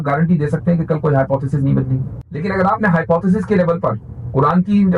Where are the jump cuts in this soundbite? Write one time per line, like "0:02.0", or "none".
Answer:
0:02.4